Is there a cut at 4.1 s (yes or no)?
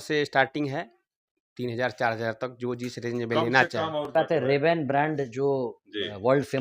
yes